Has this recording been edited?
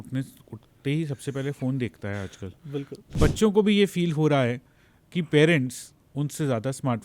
yes; 1 cut; at 3.2 s

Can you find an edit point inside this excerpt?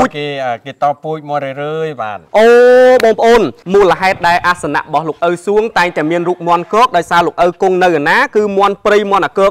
yes; 1 cut; at 3.6 s

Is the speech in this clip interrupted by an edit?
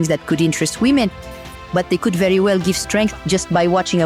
no; 0 cuts

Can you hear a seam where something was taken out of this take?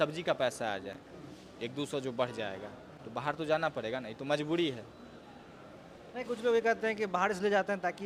no; 0 cuts

